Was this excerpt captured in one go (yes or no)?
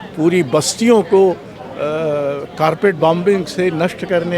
yes